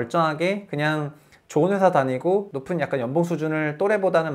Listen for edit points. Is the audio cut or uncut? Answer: uncut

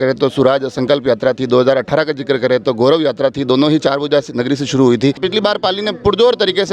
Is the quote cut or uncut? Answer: cut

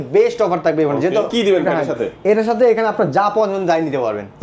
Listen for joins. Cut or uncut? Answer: cut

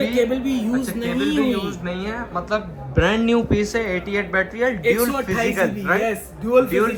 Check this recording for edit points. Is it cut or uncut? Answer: uncut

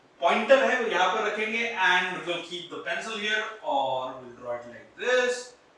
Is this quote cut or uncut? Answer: uncut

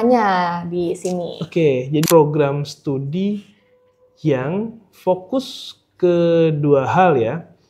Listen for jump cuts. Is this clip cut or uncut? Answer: cut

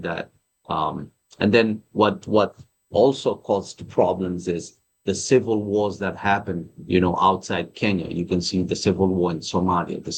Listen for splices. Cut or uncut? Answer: uncut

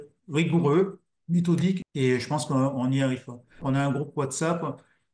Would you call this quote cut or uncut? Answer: cut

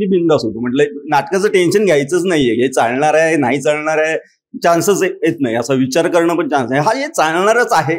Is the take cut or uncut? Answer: uncut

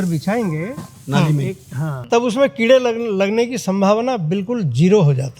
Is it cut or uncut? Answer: cut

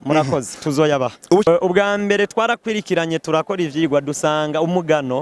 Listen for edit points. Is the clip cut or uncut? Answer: cut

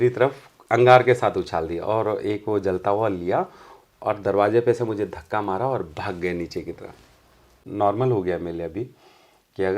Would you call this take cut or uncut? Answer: cut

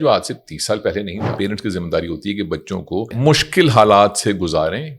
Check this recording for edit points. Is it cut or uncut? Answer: cut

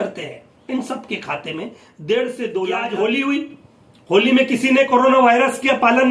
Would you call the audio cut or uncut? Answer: cut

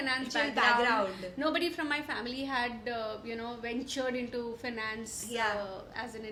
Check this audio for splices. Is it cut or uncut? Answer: uncut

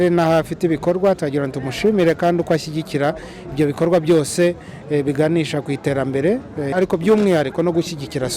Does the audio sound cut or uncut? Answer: cut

